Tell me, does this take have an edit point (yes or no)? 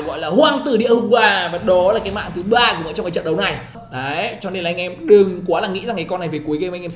yes